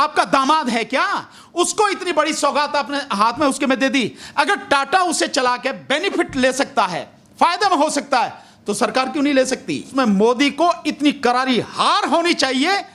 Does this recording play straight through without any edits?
no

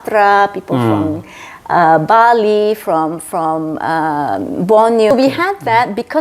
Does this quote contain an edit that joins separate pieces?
yes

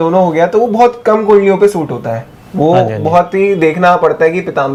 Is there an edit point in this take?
no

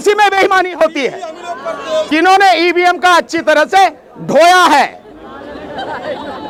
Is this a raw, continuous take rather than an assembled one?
yes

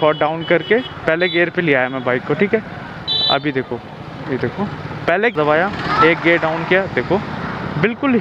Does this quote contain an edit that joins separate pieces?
yes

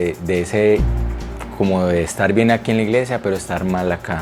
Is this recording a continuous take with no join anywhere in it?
yes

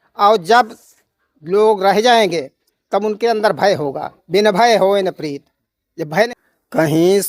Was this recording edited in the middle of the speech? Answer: yes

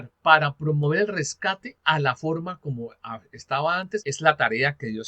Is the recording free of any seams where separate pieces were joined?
no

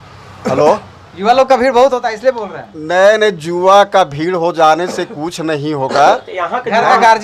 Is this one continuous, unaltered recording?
yes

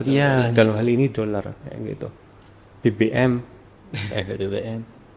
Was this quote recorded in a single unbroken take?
yes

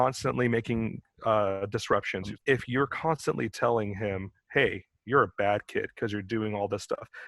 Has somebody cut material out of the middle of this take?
yes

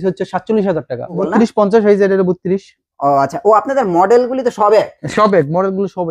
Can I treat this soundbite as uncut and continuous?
no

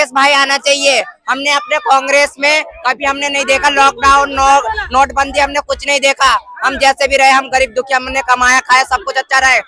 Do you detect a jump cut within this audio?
no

